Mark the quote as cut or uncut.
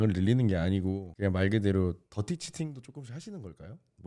cut